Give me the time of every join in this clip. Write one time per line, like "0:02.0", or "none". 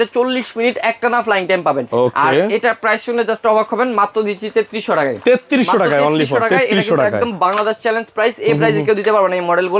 none